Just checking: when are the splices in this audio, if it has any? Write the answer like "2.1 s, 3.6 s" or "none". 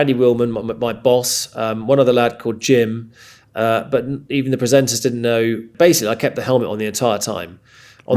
5.7 s

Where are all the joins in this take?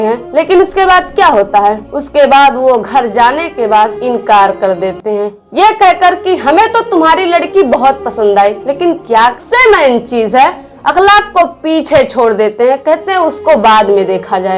9.4 s

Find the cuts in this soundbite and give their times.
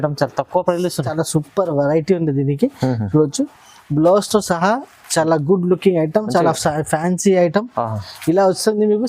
1.2 s

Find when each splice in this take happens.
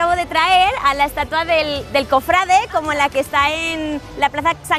none

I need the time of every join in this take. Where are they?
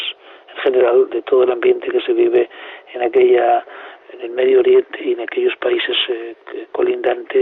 none

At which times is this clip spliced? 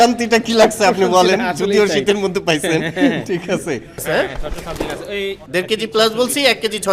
4.0 s, 5.4 s

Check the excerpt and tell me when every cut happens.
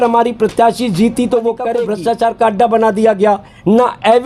1.8 s

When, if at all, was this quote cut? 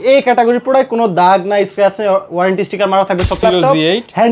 3.4 s

